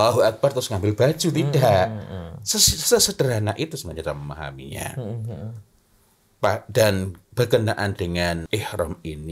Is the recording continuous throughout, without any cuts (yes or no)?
no